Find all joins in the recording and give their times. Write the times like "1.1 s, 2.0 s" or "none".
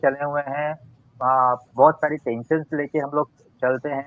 none

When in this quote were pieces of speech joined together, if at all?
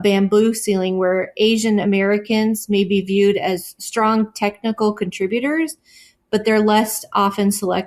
none

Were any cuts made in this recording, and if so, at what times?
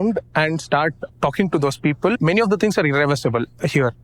2.2 s

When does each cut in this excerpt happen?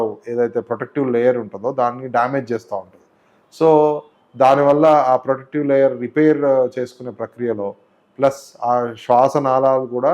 none

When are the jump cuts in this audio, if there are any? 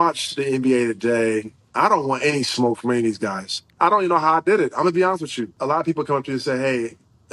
1.6 s, 3.7 s, 5.5 s

